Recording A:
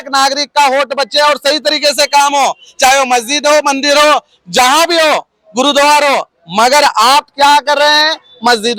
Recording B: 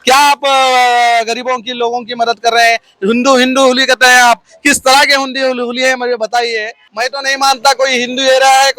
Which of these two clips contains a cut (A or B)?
B